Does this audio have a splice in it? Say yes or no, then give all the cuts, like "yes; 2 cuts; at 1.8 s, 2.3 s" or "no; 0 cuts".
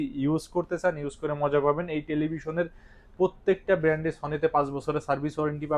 no; 0 cuts